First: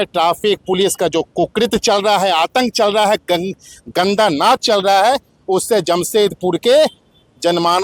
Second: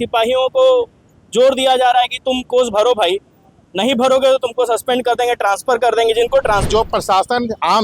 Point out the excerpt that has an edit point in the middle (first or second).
second